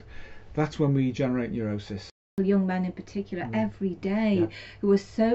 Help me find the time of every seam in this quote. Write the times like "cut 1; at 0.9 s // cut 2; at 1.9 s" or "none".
cut 1; at 2.3 s